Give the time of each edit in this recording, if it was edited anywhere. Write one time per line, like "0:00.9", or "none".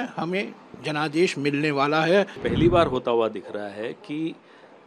0:02.4

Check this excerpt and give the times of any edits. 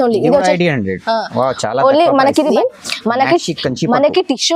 0:02.5

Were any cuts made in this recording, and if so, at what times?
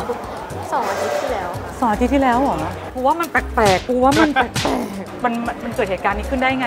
0:02.8
0:05.1

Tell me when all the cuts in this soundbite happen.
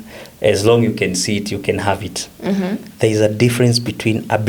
0:02.3

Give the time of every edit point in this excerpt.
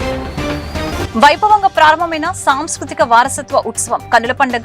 0:00.9

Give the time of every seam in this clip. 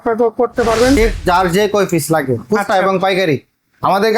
0:01.0

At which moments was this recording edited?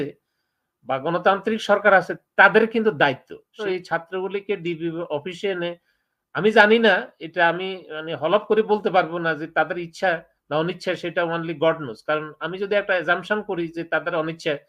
0:03.6

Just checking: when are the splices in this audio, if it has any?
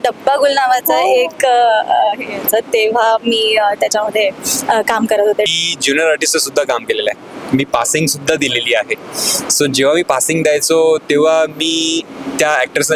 0:05.5

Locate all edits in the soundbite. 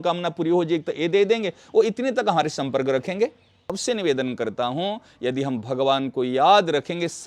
0:03.8

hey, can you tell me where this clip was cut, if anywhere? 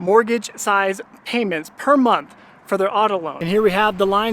0:03.3

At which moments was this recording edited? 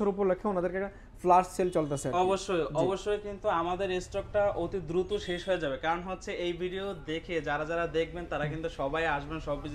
none

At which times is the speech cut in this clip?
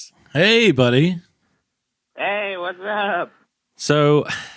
none

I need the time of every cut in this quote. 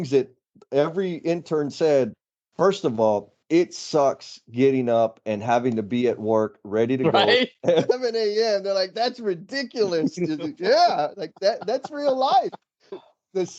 none

